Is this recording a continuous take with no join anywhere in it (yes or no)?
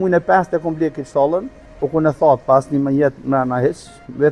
yes